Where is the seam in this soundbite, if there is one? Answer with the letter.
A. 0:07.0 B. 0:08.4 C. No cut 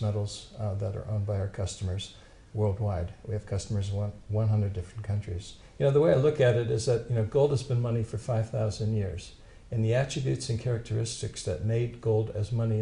A